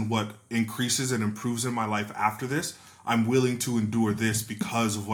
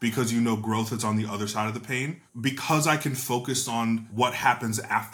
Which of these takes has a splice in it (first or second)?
second